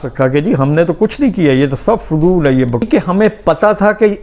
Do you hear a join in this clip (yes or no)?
yes